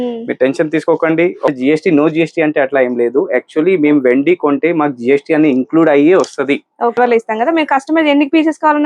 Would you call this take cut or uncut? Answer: cut